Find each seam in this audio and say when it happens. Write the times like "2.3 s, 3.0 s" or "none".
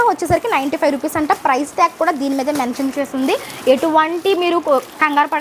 none